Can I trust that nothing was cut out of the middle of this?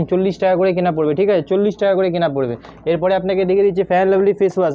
yes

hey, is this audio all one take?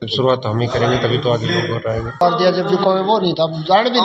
no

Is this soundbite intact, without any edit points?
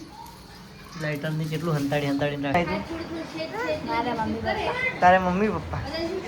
no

